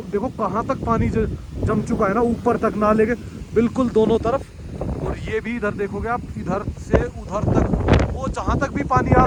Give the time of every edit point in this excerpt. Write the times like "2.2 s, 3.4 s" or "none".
none

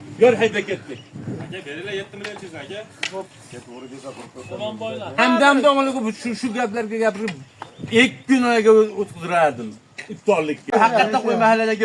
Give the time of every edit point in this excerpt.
10.7 s

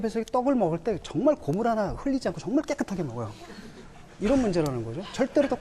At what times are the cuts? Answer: 4.5 s

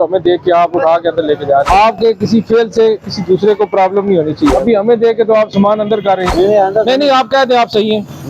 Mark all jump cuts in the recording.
1.7 s, 4.5 s, 6.3 s

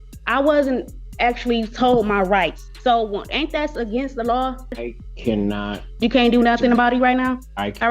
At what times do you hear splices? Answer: 2.7 s, 4.7 s

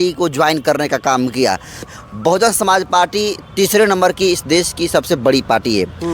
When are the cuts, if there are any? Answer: 1.9 s

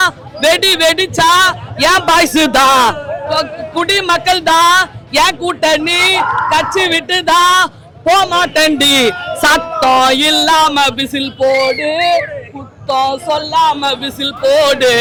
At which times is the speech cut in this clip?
none

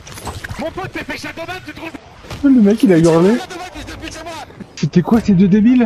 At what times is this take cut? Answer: 2.2 s, 4.7 s

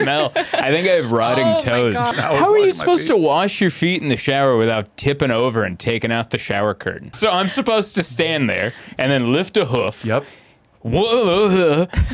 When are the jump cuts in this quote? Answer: 2.1 s, 7.1 s

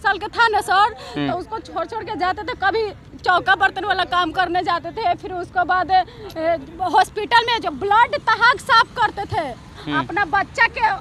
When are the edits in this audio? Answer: none

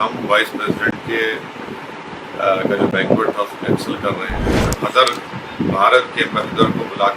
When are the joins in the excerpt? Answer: 4.5 s

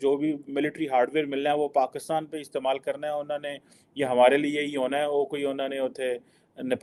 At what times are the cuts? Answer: none

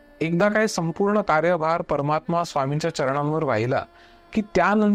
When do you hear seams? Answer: none

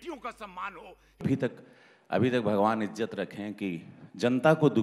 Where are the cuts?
1.4 s

